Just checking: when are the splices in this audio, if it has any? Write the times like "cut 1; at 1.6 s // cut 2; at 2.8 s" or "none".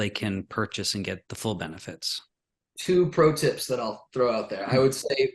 cut 1; at 1.2 s